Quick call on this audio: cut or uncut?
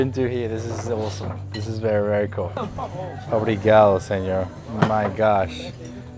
cut